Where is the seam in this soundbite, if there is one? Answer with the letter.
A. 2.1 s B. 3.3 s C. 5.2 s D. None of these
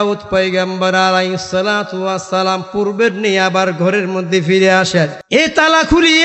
C